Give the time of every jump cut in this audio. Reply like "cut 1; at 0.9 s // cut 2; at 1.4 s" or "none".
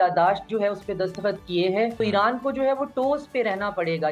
cut 1; at 2.0 s

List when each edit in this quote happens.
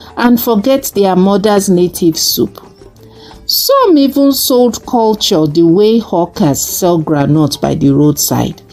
none

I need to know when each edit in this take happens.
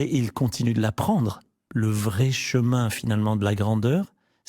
cut 1; at 1.6 s

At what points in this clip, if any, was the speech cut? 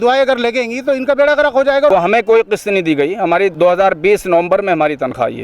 cut 1; at 1.9 s // cut 2; at 3.5 s

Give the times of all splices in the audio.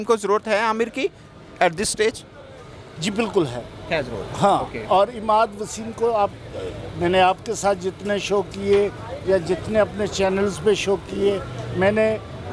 none

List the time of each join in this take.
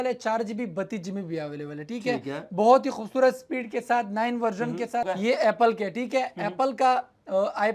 cut 1; at 5.1 s

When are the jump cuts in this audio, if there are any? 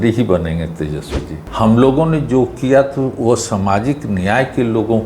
cut 1; at 1.4 s

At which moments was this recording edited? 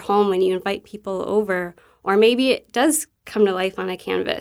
none

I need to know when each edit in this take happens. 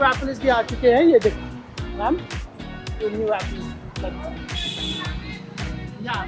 none

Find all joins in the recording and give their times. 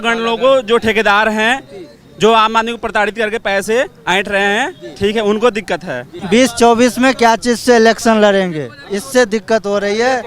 cut 1; at 6.1 s

